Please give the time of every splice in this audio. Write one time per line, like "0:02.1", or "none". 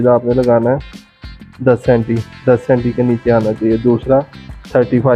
none